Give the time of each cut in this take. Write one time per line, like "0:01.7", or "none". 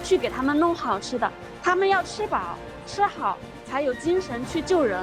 none